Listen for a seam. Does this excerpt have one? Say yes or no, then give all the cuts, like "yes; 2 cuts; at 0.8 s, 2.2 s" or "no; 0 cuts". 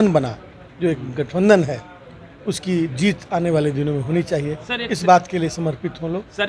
no; 0 cuts